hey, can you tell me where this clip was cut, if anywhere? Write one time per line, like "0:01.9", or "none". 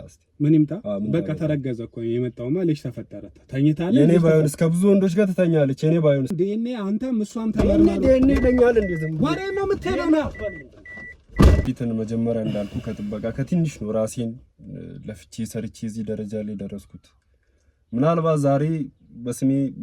0:06.3
0:11.6